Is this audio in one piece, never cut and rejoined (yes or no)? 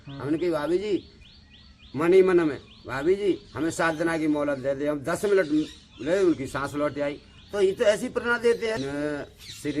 no